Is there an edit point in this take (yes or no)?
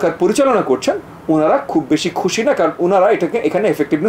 no